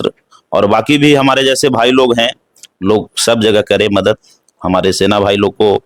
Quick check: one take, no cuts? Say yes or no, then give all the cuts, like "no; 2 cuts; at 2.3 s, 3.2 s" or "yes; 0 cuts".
yes; 0 cuts